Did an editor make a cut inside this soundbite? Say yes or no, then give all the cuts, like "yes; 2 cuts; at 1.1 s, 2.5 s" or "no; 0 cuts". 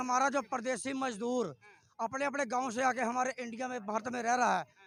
no; 0 cuts